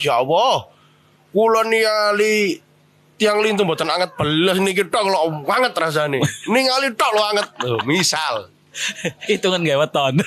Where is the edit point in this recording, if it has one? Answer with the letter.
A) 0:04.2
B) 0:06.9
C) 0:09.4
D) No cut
D